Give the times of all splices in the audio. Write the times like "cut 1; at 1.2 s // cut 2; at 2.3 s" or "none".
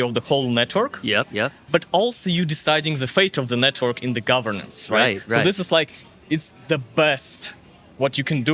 none